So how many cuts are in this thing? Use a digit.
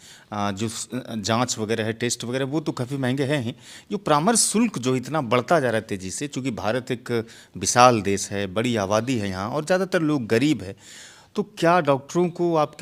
0